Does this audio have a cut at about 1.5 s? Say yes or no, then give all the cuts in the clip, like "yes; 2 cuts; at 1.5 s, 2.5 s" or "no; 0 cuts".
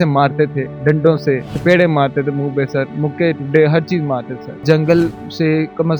yes; 2 cuts; at 1.5 s, 4.6 s